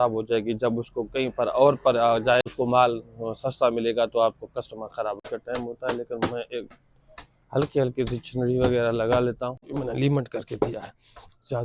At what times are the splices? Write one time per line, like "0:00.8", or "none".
0:02.5
0:05.2
0:09.7